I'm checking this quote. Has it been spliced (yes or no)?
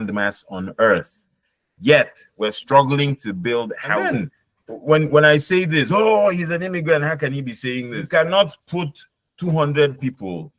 yes